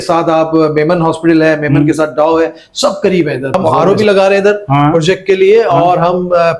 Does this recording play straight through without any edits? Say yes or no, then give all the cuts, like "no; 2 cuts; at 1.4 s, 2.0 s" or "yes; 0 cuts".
no; 1 cut; at 3.6 s